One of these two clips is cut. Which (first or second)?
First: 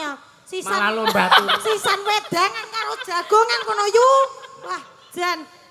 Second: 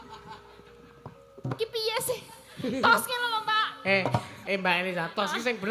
second